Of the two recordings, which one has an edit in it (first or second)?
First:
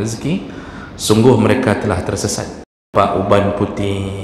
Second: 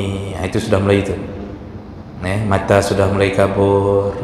first